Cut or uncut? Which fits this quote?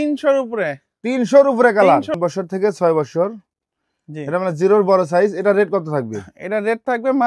cut